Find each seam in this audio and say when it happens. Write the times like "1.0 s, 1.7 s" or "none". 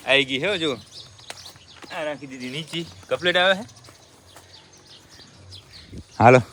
none